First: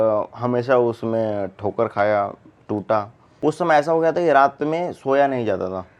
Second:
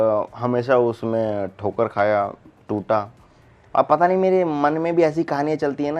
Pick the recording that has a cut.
first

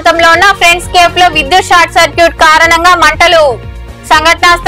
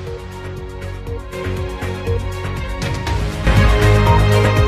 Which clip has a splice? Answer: second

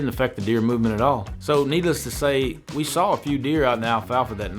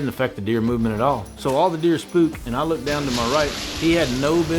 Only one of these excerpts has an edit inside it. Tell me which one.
second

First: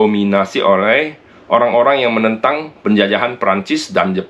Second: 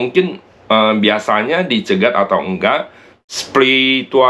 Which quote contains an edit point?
second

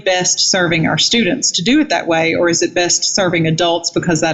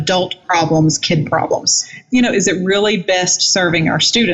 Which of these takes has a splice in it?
second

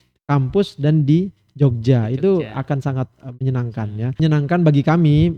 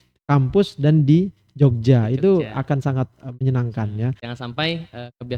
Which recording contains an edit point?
second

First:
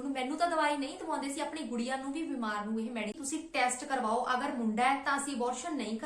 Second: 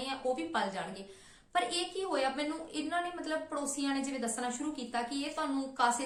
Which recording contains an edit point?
first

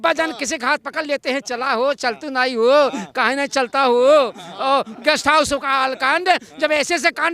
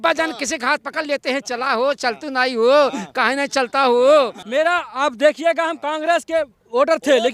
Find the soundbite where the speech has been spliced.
second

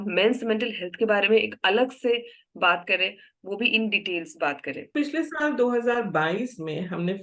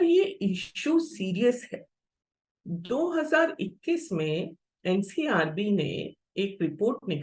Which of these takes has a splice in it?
first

